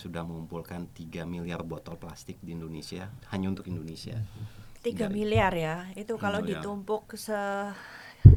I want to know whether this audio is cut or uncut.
uncut